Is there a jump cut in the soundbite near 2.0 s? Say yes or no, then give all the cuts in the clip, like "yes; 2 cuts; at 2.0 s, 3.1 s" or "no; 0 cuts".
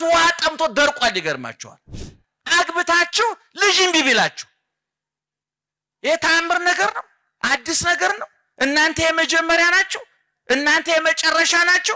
yes; 1 cut; at 2.0 s